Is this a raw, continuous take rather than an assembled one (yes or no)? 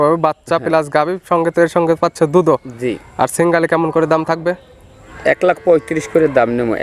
yes